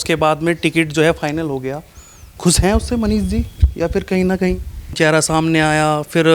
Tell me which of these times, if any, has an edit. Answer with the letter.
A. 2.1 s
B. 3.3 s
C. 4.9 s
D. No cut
C